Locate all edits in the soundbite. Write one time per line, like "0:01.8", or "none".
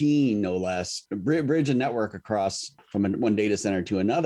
0:01.0
0:02.8